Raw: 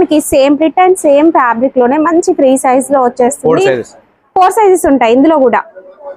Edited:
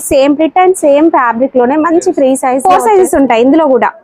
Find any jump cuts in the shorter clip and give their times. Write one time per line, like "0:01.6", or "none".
0:02.6